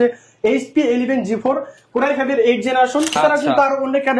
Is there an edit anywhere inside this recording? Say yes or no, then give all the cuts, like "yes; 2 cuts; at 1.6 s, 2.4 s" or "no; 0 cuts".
yes; 1 cut; at 3.2 s